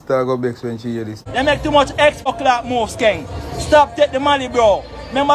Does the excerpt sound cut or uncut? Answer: cut